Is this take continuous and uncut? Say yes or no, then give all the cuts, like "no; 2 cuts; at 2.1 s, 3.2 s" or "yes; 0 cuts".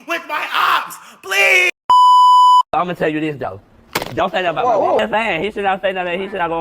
no; 1 cut; at 1.7 s